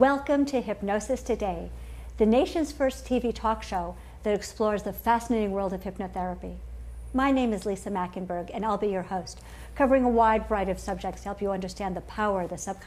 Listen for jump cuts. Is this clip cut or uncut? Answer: cut